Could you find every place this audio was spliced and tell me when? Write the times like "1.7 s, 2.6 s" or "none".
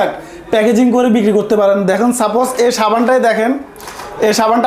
none

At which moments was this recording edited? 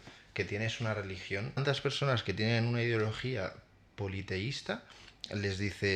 1.6 s

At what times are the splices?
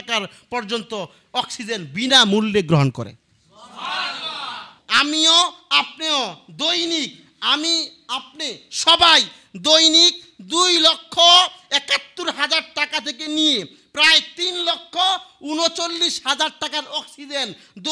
4.8 s

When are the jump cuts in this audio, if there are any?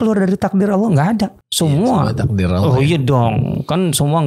1.4 s

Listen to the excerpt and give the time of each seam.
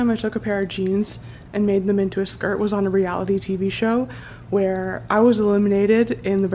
none

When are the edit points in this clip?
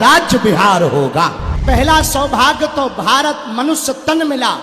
1.5 s

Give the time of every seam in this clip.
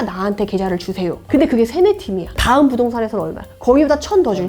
1.2 s, 2.4 s

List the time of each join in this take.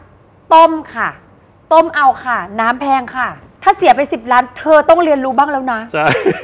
3.4 s

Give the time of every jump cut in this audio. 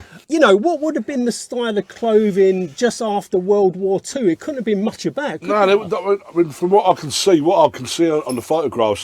none

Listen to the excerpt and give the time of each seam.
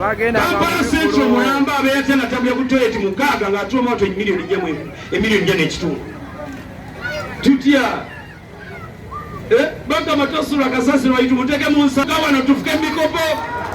12.0 s

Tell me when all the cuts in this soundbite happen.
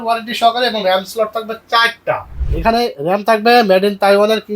2.5 s

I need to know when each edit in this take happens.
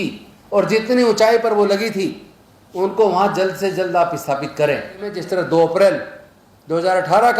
5.2 s

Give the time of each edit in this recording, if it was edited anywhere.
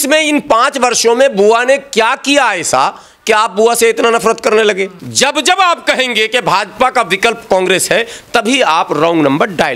5.0 s

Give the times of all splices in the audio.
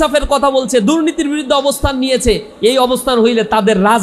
none

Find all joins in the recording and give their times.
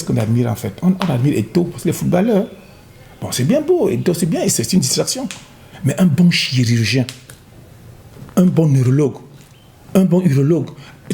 none

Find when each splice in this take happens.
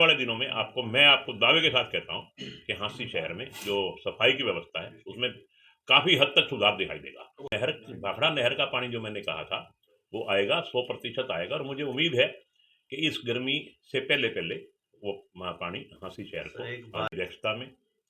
7.5 s, 17.1 s

